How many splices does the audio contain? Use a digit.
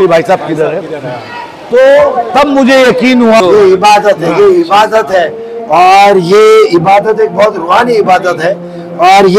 1